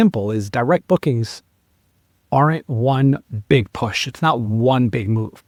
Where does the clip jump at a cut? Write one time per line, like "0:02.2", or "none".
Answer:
none